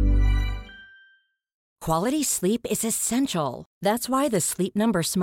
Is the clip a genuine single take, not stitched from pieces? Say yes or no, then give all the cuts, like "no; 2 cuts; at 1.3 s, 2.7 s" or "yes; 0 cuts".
no; 1 cut; at 1.7 s